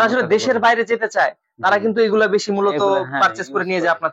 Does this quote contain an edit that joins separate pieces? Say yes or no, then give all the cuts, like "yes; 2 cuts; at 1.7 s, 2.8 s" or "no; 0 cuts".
no; 0 cuts